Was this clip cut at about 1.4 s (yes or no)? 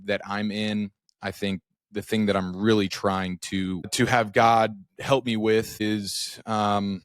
no